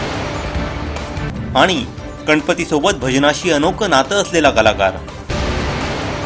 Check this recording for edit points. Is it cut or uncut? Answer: cut